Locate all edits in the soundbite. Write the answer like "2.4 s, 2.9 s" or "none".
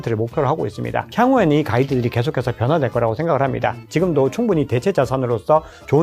1.0 s, 3.8 s

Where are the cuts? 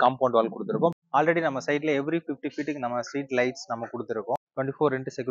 1.0 s, 4.5 s

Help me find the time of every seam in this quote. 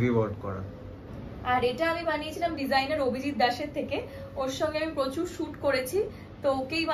none

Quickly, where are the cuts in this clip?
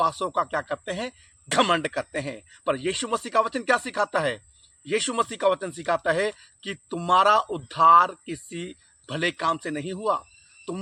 none

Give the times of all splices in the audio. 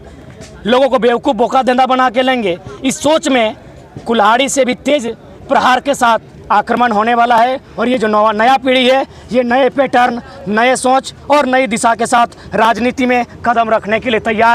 none

